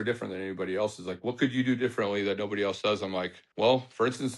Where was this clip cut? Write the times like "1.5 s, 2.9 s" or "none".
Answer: 3.4 s